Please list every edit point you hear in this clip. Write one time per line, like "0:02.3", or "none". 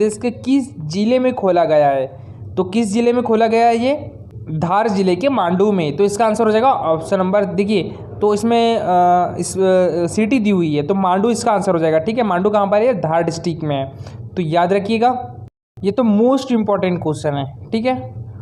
none